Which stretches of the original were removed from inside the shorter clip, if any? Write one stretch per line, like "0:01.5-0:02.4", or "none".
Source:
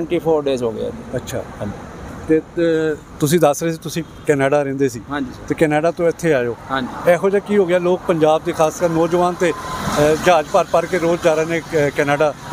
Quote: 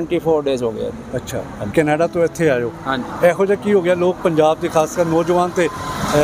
0:01.7-0:05.5